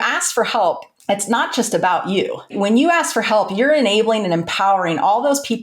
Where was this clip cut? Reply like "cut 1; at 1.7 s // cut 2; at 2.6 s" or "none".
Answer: cut 1; at 0.9 s // cut 2; at 2.5 s